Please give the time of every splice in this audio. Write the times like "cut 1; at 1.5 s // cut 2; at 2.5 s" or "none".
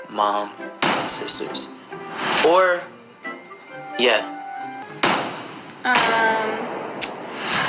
cut 1; at 4.9 s